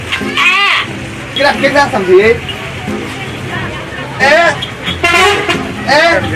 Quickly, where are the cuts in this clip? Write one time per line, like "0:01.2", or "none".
0:01.4

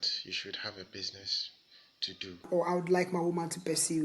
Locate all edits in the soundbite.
0:02.5

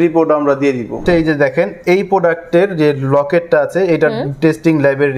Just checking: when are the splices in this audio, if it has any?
0:01.0

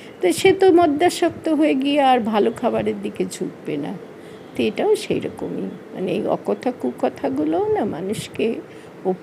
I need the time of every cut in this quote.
none

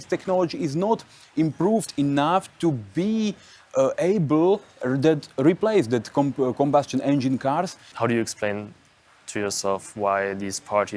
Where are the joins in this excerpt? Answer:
0:07.8

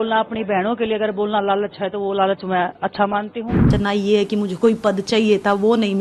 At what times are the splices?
0:03.7

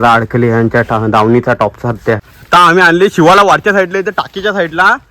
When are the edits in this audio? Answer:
0:02.3

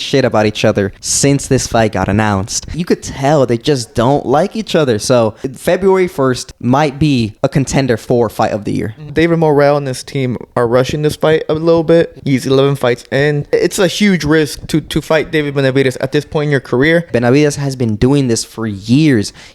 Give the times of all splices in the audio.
0:01.0
0:02.8
0:05.5
0:06.5
0:07.3
0:09.1
0:12.2
0:13.5
0:17.1

